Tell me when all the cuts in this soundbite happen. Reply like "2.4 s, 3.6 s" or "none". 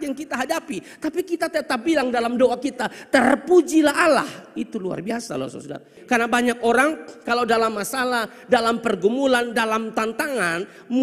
6.0 s